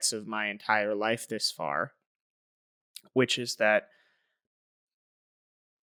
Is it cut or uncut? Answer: uncut